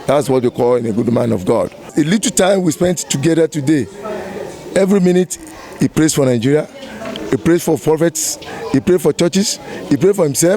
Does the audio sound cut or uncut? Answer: cut